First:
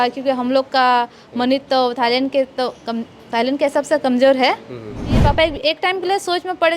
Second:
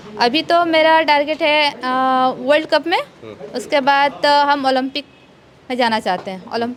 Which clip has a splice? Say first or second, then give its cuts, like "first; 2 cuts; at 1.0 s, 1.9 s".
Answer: first; 1 cut; at 5.2 s